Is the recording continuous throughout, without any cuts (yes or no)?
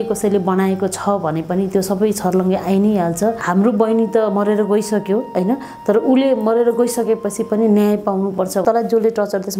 no